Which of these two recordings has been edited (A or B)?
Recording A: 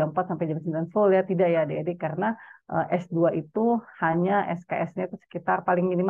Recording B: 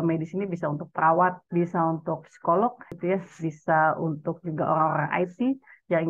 B